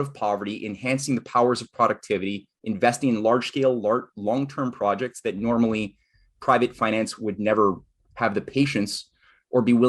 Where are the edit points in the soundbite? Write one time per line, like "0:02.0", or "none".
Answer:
none